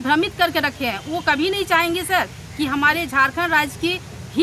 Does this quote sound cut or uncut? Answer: uncut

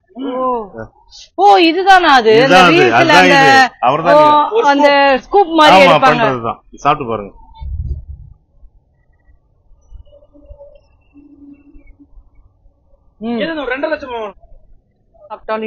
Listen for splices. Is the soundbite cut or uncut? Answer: uncut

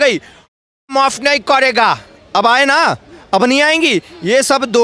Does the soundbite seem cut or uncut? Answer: uncut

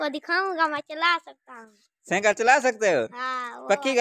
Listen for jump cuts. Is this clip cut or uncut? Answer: uncut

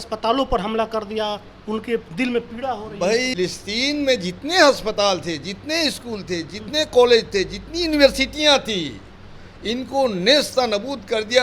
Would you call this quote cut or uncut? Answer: cut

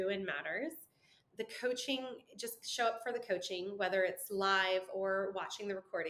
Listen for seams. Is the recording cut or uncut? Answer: uncut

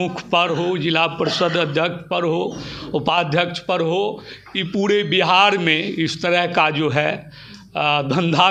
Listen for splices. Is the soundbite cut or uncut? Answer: uncut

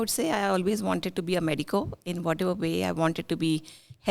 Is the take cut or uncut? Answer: uncut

